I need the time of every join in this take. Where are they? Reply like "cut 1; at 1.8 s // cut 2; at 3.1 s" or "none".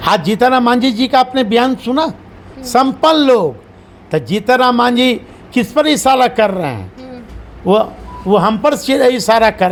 none

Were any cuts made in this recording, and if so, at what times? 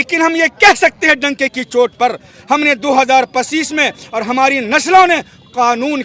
none

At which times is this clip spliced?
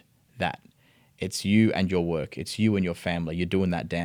none

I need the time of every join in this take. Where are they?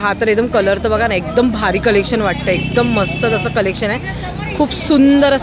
none

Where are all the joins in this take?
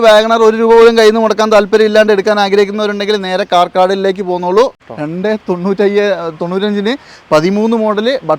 cut 1; at 4.8 s

